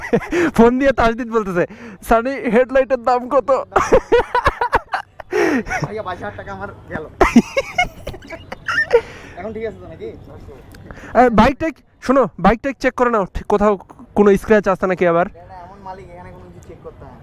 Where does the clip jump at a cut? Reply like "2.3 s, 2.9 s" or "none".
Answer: none